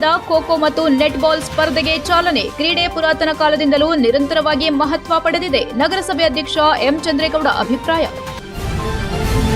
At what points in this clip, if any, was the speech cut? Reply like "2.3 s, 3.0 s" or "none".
8.3 s

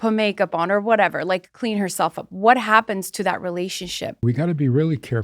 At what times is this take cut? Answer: 4.2 s

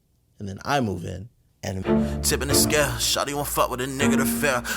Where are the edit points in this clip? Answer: 1.7 s

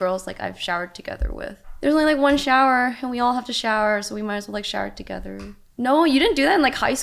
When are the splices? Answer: 1.7 s, 5.6 s

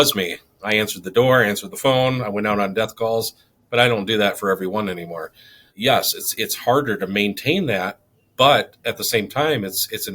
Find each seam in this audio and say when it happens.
none

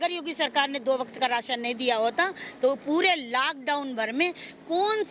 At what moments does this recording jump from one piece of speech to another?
none

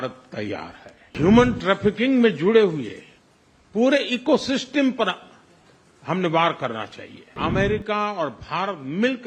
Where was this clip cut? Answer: 1.1 s, 7.3 s

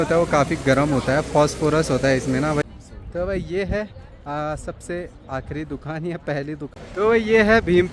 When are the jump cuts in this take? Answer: 2.6 s, 6.8 s

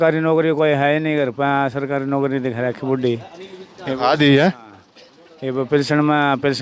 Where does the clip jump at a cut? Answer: none

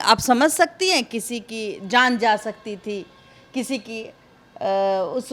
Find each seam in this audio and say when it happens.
none

